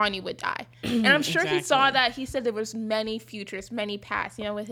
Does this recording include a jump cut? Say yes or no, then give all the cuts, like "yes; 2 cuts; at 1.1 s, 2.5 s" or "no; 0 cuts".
no; 0 cuts